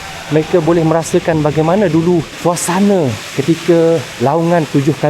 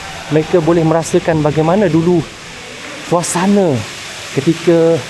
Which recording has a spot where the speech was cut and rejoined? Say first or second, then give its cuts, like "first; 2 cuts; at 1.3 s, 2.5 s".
first; 3 cuts; at 2.3 s, 3.3 s, 4.1 s